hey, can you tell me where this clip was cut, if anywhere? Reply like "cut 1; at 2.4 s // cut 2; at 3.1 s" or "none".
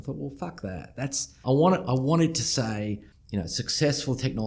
cut 1; at 1.4 s // cut 2; at 3.1 s